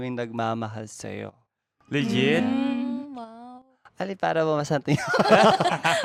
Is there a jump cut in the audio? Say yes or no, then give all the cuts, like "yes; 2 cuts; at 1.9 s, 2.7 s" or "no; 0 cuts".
no; 0 cuts